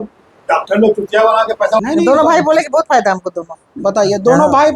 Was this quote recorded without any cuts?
no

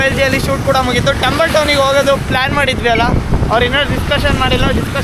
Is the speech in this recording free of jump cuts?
yes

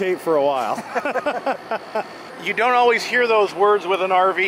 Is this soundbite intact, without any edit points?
yes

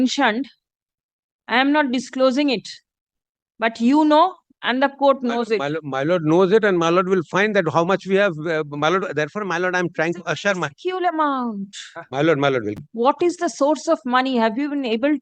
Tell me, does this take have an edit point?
yes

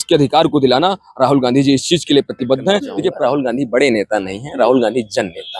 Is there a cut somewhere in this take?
yes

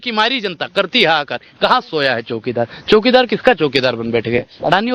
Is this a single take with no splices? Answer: yes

